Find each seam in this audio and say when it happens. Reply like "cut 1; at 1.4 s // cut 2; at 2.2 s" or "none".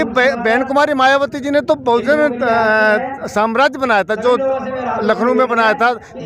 none